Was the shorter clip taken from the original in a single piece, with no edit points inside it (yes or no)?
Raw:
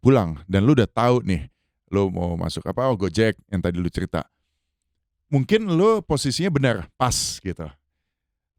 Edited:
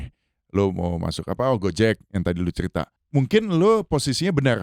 no